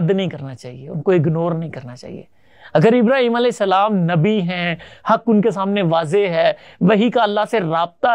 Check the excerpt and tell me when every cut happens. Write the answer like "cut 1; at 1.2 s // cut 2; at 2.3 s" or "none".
none